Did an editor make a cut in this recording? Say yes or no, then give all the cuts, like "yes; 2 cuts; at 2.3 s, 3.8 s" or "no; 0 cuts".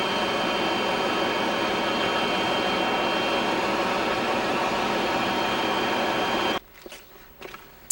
yes; 1 cut; at 6.6 s